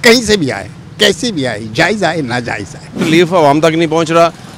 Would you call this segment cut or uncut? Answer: cut